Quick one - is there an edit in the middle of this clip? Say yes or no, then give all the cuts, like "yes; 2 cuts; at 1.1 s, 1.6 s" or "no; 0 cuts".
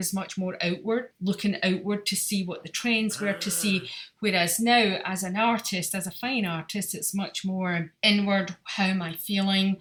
no; 0 cuts